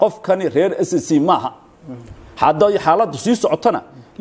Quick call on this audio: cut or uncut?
uncut